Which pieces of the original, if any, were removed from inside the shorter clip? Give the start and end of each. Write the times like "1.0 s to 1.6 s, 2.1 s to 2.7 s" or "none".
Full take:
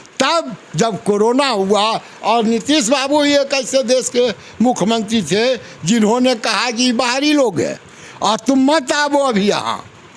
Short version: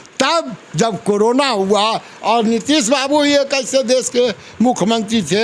none